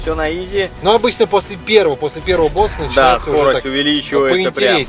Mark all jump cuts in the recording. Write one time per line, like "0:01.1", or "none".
none